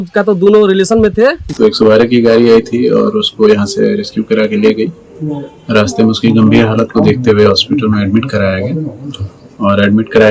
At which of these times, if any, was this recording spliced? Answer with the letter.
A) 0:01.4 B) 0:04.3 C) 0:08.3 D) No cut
A